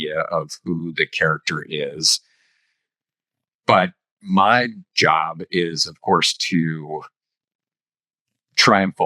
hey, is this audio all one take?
yes; 0 cuts

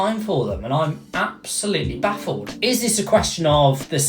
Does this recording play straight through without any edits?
yes; 0 cuts

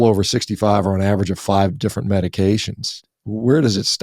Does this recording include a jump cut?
yes; 1 cut; at 3.0 s

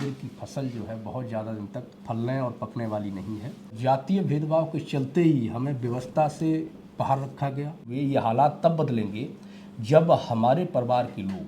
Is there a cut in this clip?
yes; 3 cuts; at 1.9 s, 3.7 s, 7.9 s

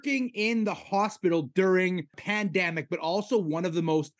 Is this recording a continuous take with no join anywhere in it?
no; 1 cut; at 2.2 s

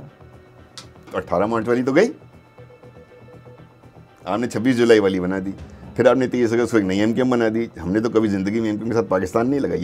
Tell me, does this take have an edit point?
no; 0 cuts

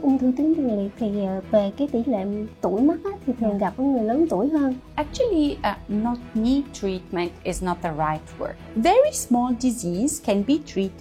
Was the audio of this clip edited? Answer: yes; 2 cuts; at 4.8 s, 8.6 s

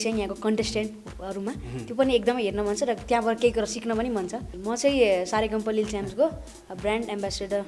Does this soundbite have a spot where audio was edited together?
yes; 1 cut; at 4.5 s

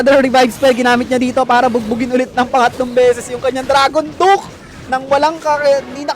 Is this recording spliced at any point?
no; 0 cuts

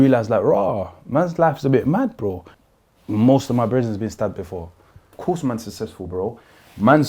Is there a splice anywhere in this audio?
yes; 2 cuts; at 2.5 s, 5.1 s

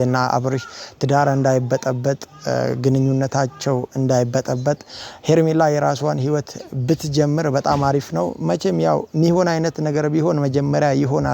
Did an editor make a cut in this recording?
yes; 1 cut; at 6.1 s

